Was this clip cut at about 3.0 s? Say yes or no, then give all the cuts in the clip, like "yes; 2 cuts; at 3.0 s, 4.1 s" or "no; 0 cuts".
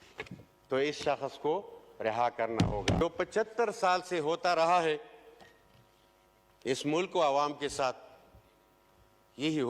yes; 1 cut; at 3.0 s